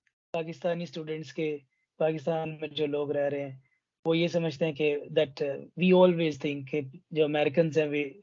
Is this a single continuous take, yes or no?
yes